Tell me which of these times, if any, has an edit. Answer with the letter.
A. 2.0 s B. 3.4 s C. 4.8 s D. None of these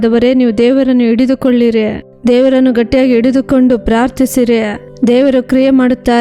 A